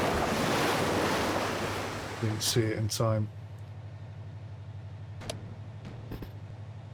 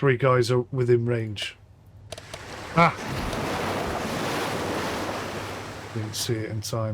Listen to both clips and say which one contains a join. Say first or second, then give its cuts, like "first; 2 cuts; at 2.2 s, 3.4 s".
second; 1 cut; at 2.0 s